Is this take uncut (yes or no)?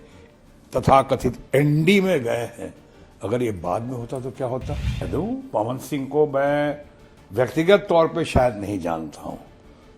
no